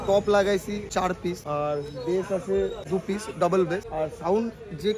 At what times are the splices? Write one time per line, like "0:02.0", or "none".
0:01.0
0:02.8
0:03.9